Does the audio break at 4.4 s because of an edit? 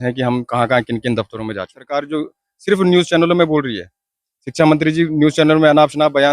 no; 1 cut; at 1.9 s

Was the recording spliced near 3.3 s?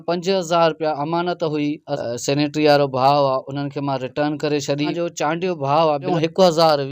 no; 3 cuts; at 1.9 s, 4.9 s, 6.1 s

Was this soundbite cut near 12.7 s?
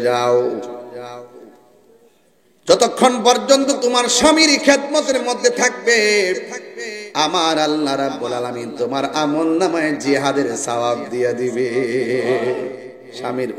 yes; 1 cut; at 12.7 s

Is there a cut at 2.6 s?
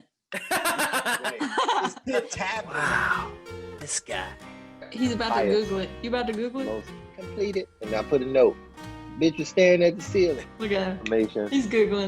yes; 1 cut; at 2.6 s

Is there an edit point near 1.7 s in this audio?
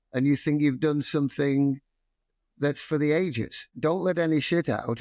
no; 1 cut; at 3.6 s

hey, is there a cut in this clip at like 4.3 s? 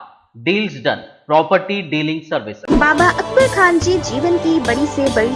no; 1 cut; at 2.5 s

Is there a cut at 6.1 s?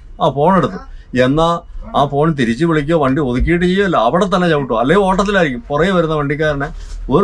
no; 0 cuts

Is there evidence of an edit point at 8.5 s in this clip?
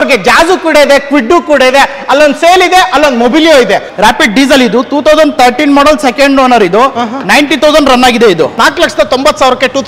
yes; 2 cuts; at 3.9 s, 8.5 s

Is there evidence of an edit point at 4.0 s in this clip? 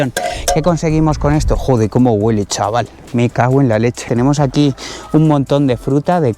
yes; 1 cut; at 4.0 s

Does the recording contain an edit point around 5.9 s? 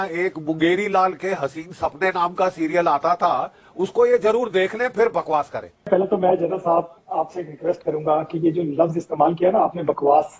yes; 1 cut; at 5.9 s

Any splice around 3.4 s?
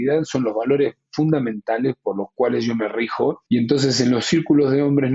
yes; 1 cut; at 3.4 s

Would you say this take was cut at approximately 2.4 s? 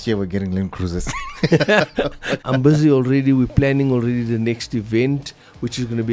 yes; 1 cut; at 2.4 s

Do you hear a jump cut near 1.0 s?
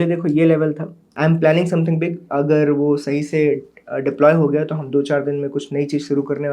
yes; 1 cut; at 1.0 s

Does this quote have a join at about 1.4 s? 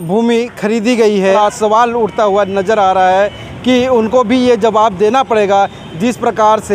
yes; 1 cut; at 1.4 s

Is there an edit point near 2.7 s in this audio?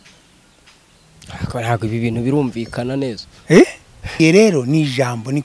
no; 1 cut; at 4.2 s

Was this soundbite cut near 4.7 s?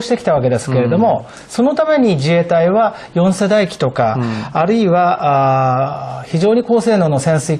yes; 1 cut; at 4.7 s

